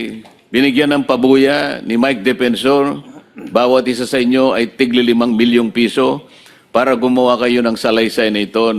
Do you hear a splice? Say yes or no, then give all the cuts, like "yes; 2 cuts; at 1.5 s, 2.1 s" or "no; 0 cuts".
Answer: no; 0 cuts